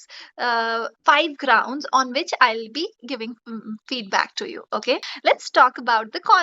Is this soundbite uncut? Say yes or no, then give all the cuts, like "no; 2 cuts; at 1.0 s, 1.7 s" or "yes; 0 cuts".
no; 1 cut; at 5.1 s